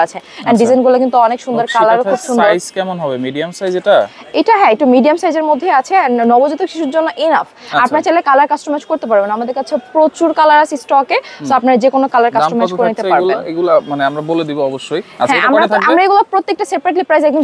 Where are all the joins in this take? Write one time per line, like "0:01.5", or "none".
none